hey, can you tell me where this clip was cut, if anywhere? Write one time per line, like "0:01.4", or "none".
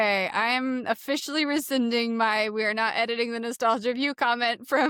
none